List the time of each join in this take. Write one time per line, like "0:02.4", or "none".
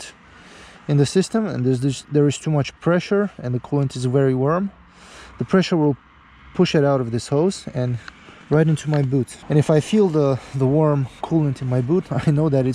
0:09.4